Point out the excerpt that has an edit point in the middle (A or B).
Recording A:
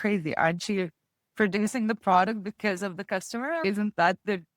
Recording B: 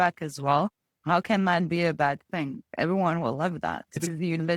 A